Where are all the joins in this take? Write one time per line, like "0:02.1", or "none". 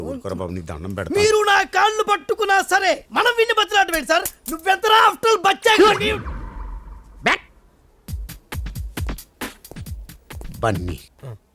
none